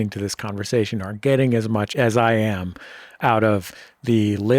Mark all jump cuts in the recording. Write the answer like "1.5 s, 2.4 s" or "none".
1.9 s, 3.1 s